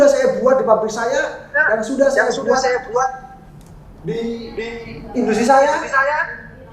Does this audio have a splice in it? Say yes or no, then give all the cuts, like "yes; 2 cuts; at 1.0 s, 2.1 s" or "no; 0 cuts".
no; 0 cuts